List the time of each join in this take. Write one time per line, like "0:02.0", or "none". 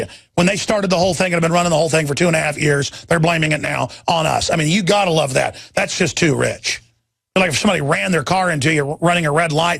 0:07.6